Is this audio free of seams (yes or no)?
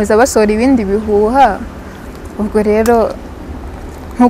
yes